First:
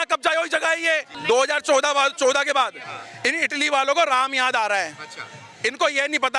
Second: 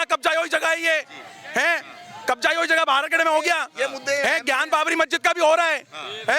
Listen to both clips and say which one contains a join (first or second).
first